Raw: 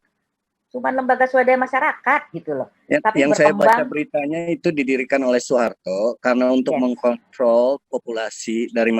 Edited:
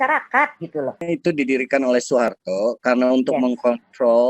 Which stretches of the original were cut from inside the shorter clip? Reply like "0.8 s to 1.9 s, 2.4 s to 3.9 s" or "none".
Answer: 2.7 s to 4.4 s